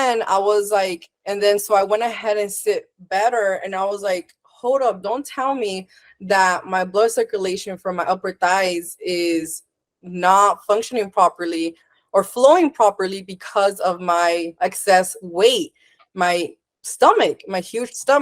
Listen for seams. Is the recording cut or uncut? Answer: cut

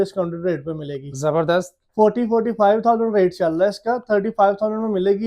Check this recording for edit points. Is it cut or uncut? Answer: uncut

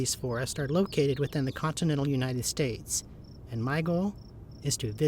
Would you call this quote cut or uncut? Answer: uncut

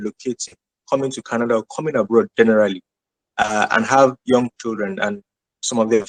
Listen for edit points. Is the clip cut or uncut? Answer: uncut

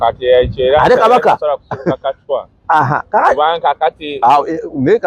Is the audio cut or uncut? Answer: uncut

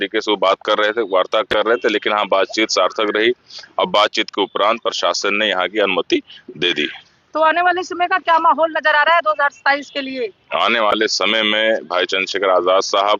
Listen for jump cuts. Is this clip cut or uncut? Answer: uncut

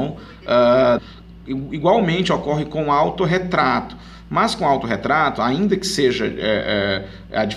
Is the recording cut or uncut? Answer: uncut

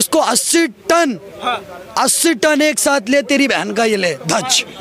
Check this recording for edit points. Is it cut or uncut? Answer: uncut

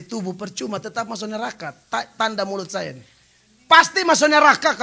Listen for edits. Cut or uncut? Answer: uncut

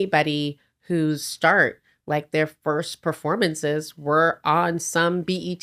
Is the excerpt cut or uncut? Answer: uncut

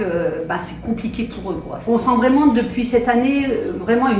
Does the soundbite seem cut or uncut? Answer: cut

